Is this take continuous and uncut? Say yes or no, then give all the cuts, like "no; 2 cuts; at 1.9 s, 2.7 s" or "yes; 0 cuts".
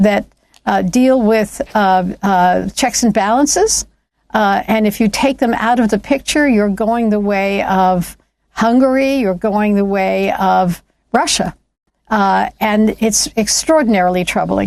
yes; 0 cuts